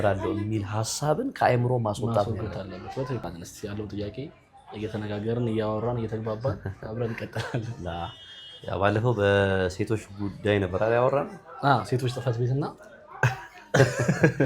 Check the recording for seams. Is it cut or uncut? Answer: cut